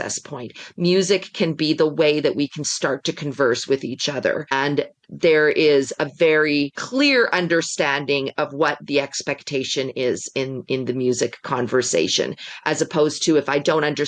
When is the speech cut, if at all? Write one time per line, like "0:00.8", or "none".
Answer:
0:04.5
0:06.8